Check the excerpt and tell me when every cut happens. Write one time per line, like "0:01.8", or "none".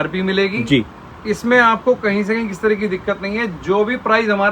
none